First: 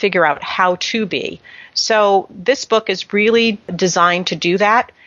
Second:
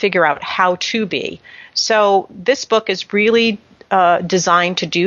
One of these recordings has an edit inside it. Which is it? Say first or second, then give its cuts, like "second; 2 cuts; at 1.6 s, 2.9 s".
first; 1 cut; at 3.7 s